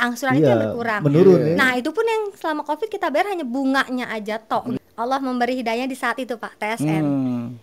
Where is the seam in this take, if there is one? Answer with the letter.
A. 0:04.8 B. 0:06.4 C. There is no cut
A